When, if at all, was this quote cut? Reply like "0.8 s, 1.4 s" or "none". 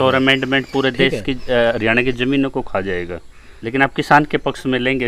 3.5 s

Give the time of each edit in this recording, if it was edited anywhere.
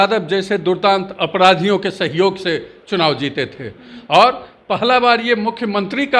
none

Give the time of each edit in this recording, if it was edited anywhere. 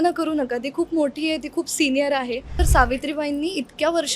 2.6 s

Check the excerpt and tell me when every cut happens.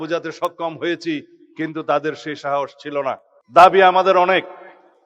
3.3 s

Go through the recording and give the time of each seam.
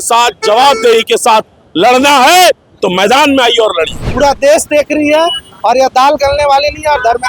4.0 s

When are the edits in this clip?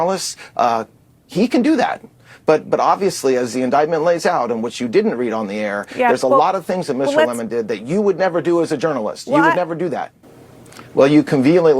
10.2 s

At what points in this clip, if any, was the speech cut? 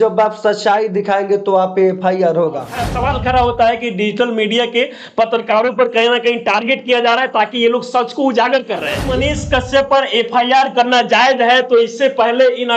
2.8 s, 9.0 s

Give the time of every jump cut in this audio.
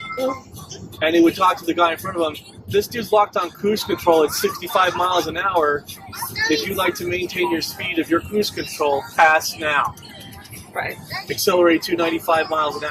2.5 s

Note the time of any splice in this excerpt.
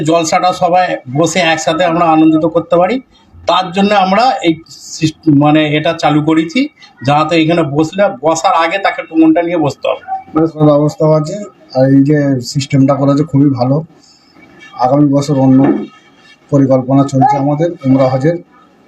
10.5 s

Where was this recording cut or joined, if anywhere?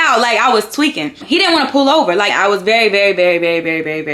1.1 s, 2.3 s

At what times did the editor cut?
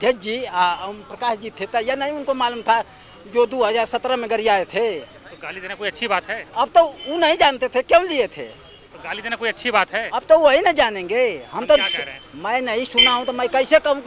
none

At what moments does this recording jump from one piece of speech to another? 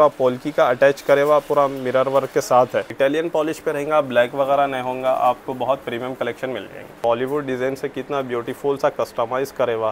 2.9 s, 7.0 s

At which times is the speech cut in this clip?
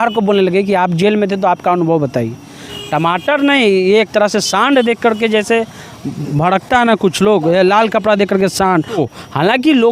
2.7 s, 9.0 s

